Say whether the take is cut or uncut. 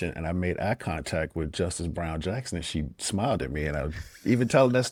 uncut